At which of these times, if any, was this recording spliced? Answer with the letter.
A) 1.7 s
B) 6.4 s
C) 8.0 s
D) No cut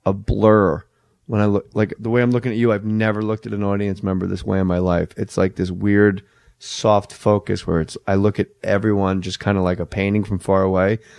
C